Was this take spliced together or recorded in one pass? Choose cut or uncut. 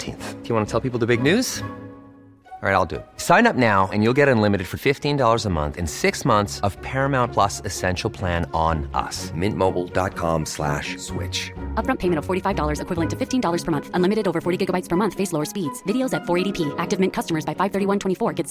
uncut